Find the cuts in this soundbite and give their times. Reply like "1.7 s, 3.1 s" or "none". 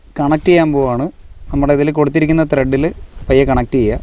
none